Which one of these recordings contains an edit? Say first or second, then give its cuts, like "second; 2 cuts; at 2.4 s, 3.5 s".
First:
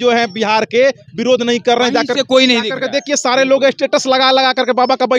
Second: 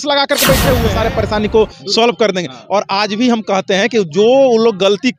second; 1 cut; at 0.9 s